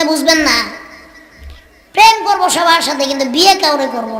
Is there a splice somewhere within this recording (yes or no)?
no